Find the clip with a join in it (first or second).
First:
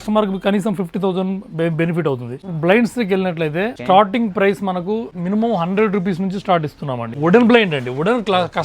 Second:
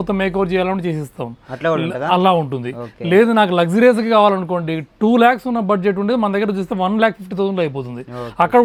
first